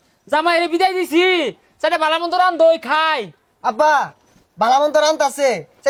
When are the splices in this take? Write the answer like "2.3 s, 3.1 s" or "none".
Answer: none